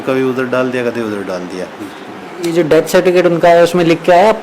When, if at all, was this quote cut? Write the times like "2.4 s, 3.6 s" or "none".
1.8 s